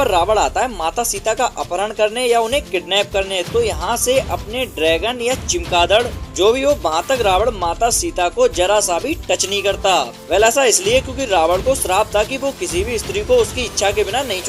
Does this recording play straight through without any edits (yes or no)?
yes